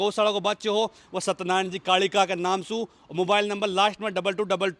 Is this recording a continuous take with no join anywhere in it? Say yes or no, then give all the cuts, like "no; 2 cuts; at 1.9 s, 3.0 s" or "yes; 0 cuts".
yes; 0 cuts